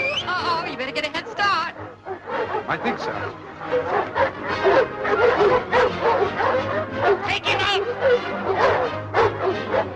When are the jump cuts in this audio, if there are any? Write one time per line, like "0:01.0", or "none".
none